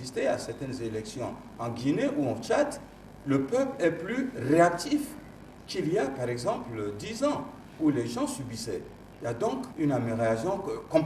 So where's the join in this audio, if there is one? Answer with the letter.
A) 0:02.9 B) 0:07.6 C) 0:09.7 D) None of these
C